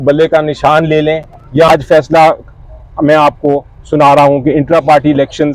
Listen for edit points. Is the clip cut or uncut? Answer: cut